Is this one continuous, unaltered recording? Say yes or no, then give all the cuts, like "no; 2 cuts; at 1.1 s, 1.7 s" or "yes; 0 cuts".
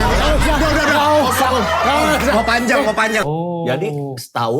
no; 1 cut; at 3.2 s